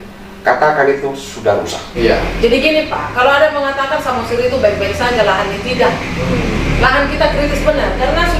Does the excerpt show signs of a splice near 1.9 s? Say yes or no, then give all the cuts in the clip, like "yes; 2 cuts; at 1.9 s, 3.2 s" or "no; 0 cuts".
yes; 1 cut; at 1.9 s